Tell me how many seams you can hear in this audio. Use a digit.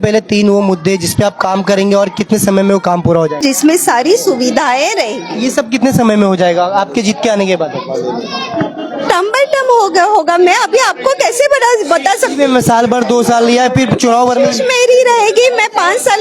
1